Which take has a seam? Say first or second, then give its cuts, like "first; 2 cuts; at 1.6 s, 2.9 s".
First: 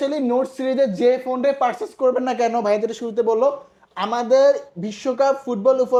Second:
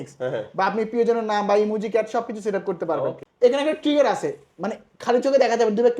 second; 1 cut; at 3.2 s